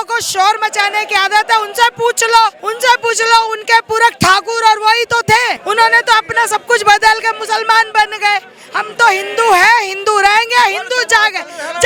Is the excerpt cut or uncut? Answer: uncut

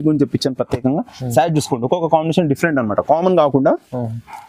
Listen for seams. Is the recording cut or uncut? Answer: uncut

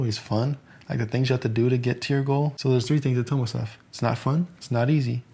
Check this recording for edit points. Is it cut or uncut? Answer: cut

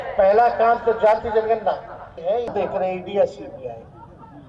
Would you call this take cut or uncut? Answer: cut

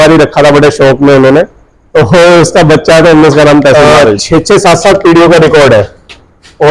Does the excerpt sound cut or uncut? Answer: cut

